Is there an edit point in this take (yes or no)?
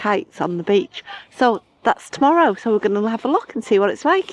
no